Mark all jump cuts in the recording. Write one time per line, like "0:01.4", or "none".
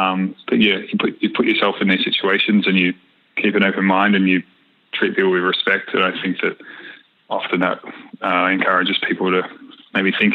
none